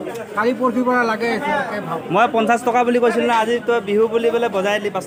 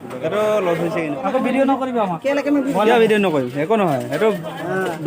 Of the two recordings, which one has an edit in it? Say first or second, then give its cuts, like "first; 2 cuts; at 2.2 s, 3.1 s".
second; 1 cut; at 1.1 s